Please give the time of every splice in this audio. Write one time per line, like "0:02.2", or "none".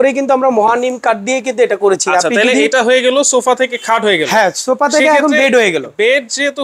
none

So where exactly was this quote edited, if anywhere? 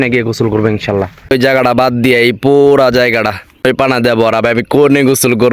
0:01.3
0:03.6

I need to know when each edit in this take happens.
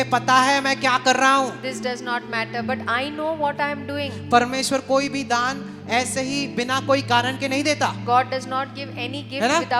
none

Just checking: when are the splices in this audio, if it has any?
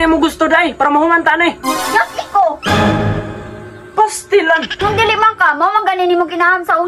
0:04.8

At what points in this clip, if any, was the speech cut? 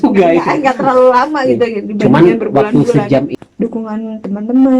0:03.4

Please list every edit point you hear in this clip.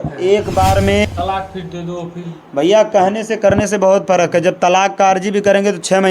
0:01.1

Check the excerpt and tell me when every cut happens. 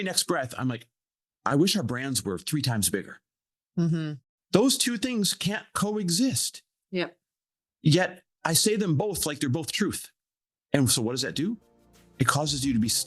0:04.2

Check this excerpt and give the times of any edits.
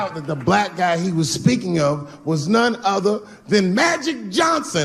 0:00.9

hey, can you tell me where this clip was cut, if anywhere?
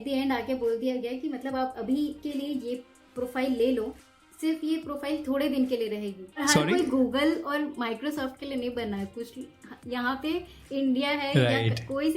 0:06.4

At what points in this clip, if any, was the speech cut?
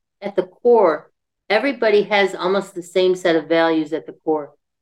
none

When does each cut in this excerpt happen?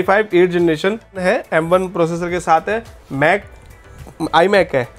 0:01.2

